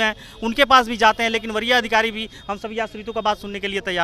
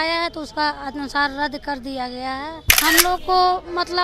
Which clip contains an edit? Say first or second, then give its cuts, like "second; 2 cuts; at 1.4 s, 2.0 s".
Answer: second; 1 cut; at 2.6 s